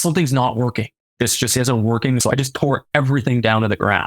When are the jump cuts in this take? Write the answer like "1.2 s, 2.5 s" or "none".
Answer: 2.2 s